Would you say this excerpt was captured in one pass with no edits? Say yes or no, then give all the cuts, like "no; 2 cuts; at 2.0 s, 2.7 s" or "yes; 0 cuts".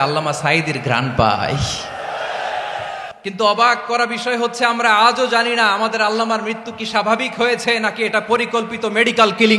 no; 1 cut; at 3.1 s